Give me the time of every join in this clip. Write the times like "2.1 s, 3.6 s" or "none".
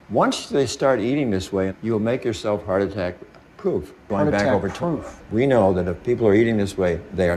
none